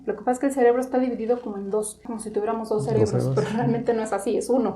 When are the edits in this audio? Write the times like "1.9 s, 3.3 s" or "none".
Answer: 2.1 s